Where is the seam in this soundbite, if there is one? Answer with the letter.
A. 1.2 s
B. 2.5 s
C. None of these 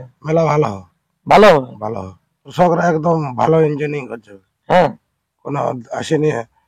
B